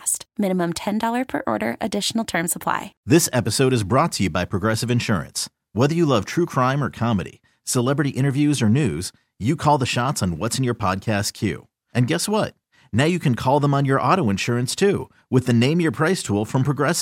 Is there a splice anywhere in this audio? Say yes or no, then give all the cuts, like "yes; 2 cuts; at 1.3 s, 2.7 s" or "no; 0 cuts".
yes; 1 cut; at 2.9 s